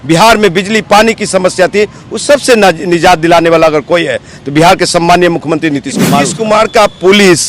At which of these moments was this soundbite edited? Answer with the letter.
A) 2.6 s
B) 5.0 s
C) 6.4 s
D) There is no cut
C